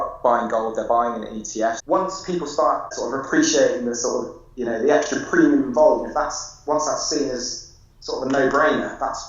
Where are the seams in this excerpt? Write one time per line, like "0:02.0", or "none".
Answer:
0:01.8
0:02.9